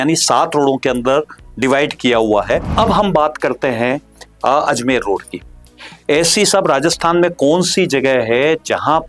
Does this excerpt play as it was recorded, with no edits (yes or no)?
no